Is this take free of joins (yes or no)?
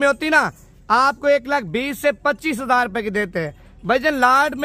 yes